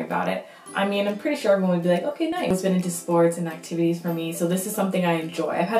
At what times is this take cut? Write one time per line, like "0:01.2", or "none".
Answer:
0:02.4